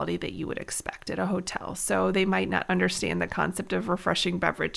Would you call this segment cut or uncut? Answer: uncut